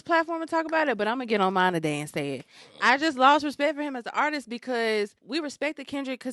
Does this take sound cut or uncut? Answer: cut